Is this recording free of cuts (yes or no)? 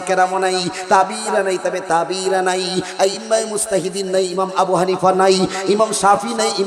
yes